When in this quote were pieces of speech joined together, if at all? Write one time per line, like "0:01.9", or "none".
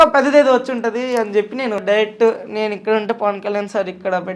0:01.8